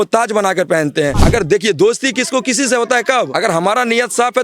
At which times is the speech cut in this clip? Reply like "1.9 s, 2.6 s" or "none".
1.2 s, 3.3 s